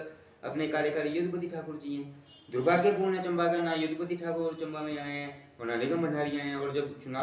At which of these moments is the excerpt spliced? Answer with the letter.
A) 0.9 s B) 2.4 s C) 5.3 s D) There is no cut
D